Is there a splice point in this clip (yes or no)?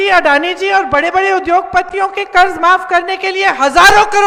no